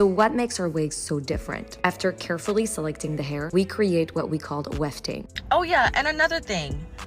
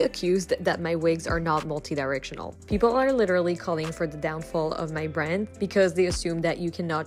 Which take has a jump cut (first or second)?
first